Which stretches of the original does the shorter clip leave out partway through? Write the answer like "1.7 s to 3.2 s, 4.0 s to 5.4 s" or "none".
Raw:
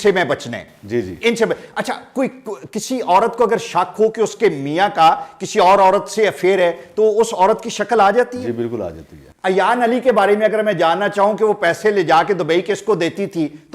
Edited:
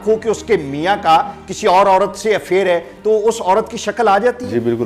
none